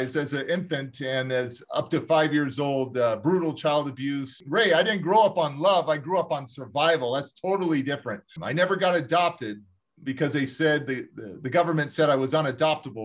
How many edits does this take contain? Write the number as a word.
two